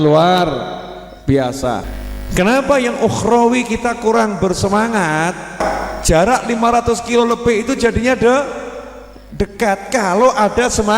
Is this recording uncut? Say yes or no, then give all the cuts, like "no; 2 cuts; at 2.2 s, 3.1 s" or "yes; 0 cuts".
no; 2 cuts; at 1.8 s, 5.5 s